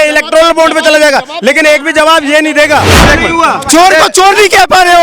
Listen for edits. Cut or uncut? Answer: cut